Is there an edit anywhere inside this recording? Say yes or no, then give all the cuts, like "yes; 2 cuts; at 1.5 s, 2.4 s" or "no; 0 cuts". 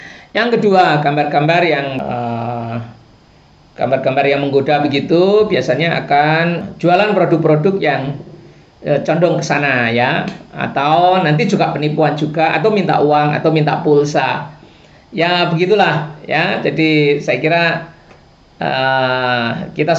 yes; 2 cuts; at 1.9 s, 6.7 s